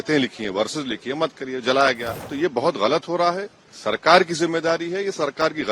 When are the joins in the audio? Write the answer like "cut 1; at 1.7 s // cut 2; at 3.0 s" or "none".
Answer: cut 1; at 2.1 s